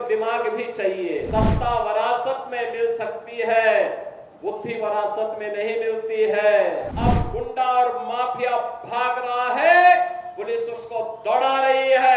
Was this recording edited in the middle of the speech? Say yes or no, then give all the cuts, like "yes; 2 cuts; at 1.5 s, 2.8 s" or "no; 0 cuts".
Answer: yes; 2 cuts; at 1.3 s, 6.9 s